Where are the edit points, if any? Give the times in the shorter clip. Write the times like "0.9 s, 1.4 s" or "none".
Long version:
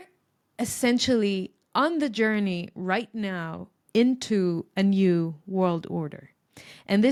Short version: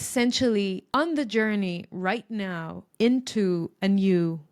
0.8 s, 2.8 s

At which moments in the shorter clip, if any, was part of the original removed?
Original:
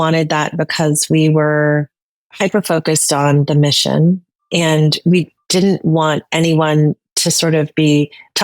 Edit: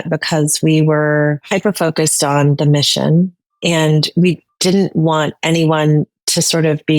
1.4 s

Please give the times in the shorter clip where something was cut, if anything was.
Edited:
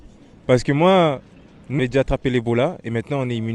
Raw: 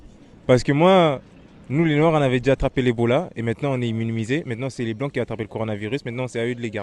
1.8 s

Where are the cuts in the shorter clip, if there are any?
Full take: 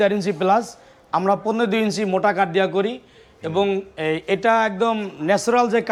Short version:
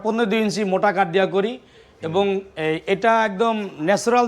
none

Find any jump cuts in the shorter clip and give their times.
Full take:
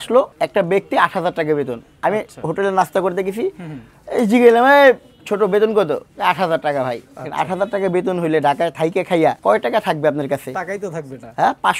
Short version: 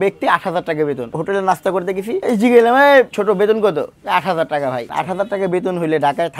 1.1 s, 2.2 s, 3.1 s, 4.9 s

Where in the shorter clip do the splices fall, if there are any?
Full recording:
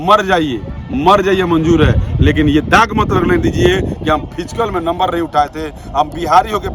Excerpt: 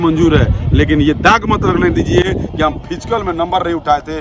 none

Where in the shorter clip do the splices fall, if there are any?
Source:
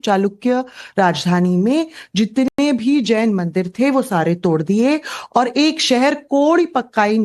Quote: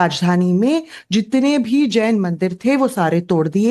1.4 s

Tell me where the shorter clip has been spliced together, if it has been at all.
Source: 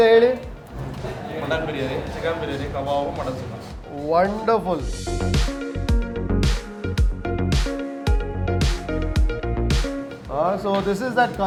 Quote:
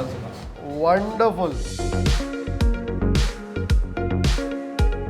none

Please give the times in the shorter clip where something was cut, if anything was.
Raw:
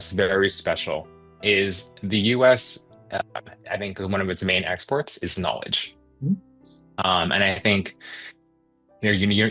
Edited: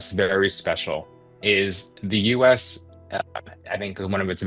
none

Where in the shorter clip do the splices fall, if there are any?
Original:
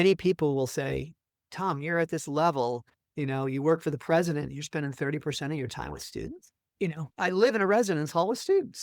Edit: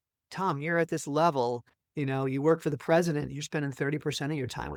none

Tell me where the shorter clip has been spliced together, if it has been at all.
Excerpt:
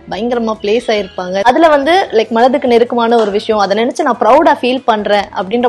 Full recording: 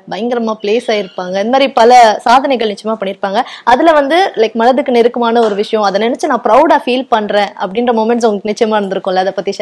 1.4 s

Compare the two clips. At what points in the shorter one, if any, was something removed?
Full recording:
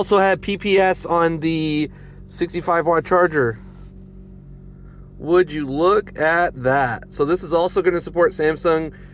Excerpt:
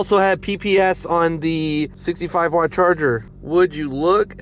2.0 s, 3.3 s

